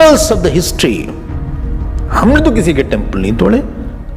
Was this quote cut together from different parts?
no; 0 cuts

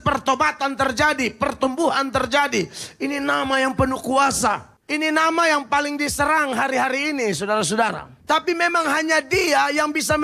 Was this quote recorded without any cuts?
no; 2 cuts; at 4.7 s, 8.1 s

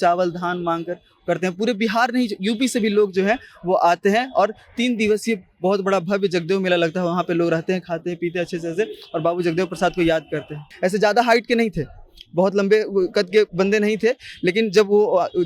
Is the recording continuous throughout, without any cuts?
no; 1 cut; at 10.7 s

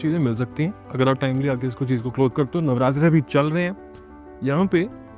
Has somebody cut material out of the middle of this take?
no; 0 cuts

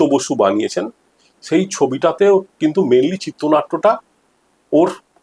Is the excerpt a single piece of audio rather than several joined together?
yes; 0 cuts

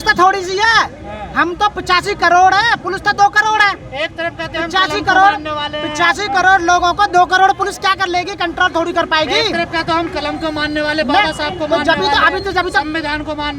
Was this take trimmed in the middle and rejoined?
no; 0 cuts

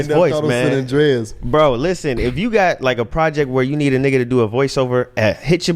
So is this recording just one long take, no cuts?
yes; 0 cuts

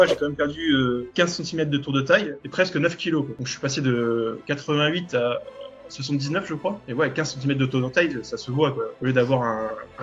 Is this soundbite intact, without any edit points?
yes; 0 cuts

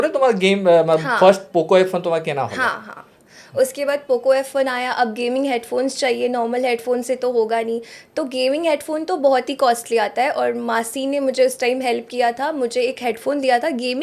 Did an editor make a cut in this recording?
no; 0 cuts

